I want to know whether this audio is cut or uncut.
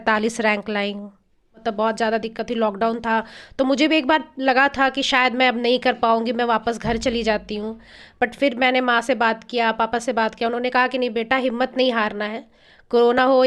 cut